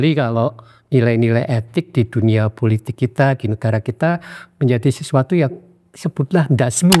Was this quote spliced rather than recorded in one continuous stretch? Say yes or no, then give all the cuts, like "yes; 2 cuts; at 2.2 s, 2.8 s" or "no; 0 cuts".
no; 0 cuts